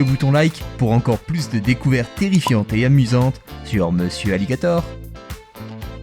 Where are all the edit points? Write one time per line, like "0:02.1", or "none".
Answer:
0:04.9